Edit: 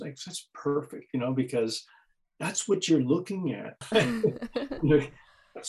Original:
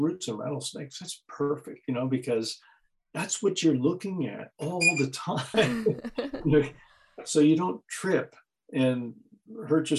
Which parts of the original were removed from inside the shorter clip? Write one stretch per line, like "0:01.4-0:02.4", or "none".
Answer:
0:04.6-0:05.4